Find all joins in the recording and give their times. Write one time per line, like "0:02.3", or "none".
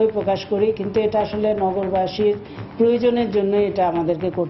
none